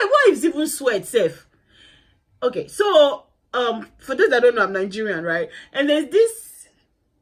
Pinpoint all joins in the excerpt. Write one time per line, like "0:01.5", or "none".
none